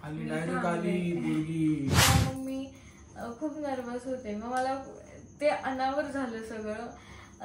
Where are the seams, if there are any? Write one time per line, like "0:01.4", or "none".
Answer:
0:02.0